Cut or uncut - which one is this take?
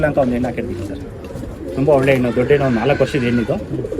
uncut